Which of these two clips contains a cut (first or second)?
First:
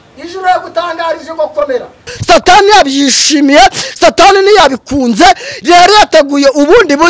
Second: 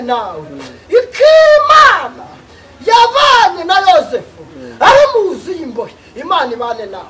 first